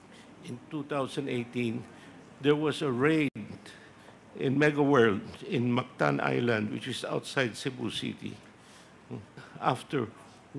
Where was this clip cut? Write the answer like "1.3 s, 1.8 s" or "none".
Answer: 9.4 s